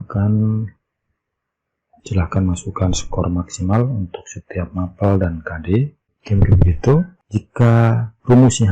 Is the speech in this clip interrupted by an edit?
yes; 2 cuts; at 6.2 s, 7.2 s

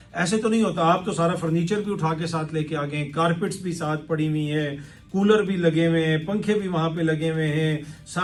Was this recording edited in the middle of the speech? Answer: no; 0 cuts

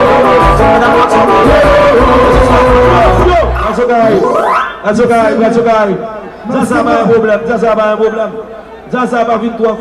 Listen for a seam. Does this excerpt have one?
yes; 1 cut; at 3.4 s

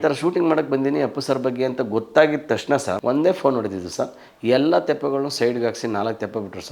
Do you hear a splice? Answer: yes; 1 cut; at 3.0 s

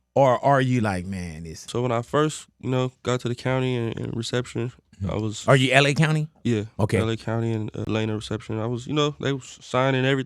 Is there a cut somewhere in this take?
yes; 2 cuts; at 1.7 s, 7.8 s

